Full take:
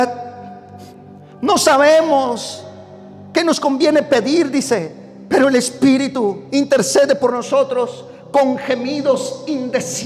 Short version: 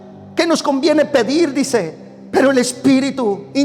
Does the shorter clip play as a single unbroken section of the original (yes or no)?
yes